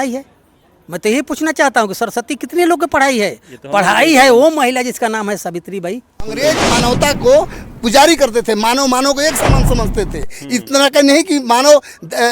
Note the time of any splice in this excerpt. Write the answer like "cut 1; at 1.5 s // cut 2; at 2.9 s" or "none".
cut 1; at 6.4 s